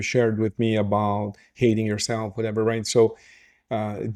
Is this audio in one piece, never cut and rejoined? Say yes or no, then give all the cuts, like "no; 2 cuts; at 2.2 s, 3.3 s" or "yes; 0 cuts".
yes; 0 cuts